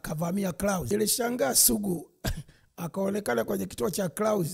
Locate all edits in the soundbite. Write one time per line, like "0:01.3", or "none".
0:00.9